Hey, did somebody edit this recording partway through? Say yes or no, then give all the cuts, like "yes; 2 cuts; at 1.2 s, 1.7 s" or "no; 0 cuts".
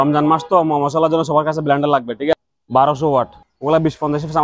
yes; 2 cuts; at 2.3 s, 3.5 s